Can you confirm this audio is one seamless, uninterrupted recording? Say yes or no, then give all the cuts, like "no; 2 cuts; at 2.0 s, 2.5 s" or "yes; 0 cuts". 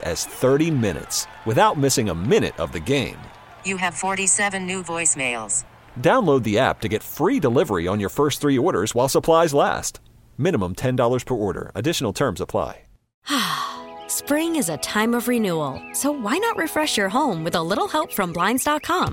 no; 1 cut; at 13.1 s